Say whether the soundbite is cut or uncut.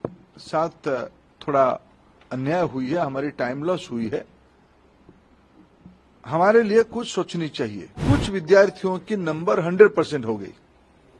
cut